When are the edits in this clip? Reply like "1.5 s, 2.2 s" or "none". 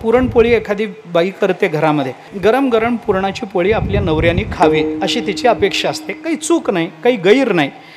2.3 s